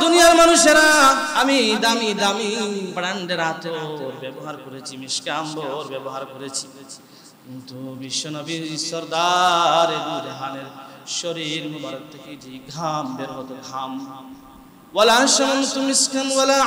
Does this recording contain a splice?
yes; 2 cuts; at 1.3 s, 2.9 s

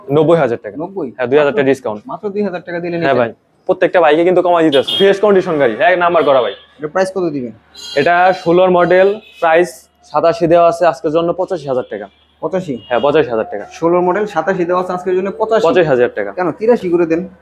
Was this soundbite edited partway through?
no; 0 cuts

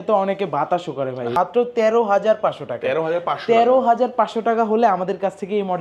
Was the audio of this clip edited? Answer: yes; 1 cut; at 1.3 s

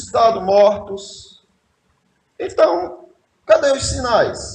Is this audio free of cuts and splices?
yes; 0 cuts

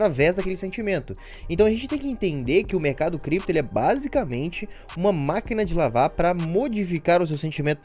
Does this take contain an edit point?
no; 0 cuts

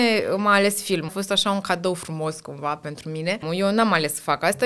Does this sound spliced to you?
yes; 2 cuts; at 1.1 s, 3.4 s

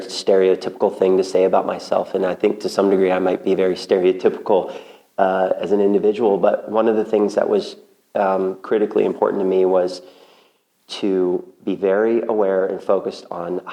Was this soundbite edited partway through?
no; 0 cuts

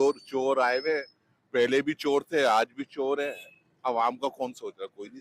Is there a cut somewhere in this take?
no; 0 cuts

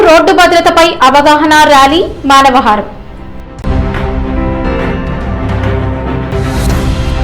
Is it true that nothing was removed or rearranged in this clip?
no; 1 cut; at 6.3 s

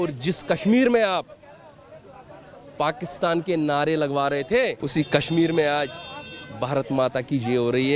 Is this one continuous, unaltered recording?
no; 1 cut; at 4.8 s

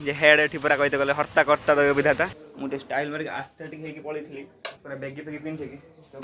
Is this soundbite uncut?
no; 2 cuts; at 2.4 s, 4.8 s

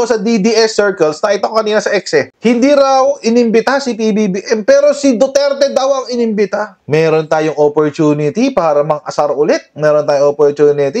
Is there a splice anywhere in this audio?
yes; 1 cut; at 6.8 s

